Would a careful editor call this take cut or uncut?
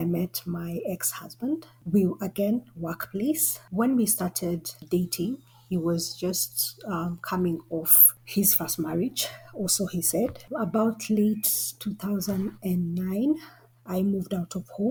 uncut